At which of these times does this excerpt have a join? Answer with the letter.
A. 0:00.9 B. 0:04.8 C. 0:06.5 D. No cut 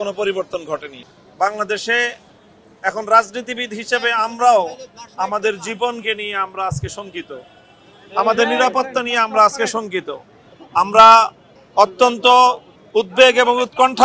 A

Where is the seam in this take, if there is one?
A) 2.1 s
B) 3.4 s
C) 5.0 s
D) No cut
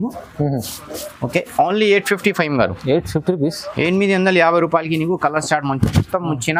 D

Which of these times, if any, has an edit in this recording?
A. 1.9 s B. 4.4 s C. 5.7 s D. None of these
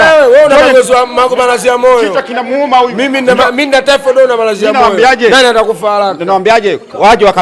D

